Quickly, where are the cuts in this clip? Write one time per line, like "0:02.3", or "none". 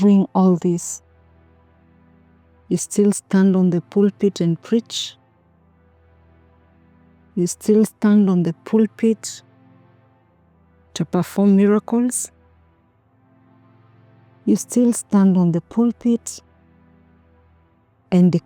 0:00.8
0:02.6
0:04.9
0:07.3